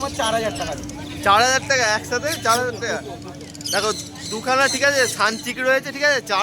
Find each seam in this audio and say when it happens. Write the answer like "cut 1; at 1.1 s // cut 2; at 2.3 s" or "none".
none